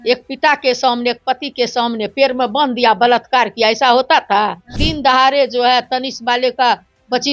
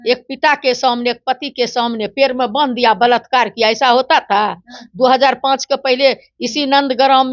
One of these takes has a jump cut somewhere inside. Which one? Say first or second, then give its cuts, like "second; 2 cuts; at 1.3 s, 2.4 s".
first; 1 cut; at 4.8 s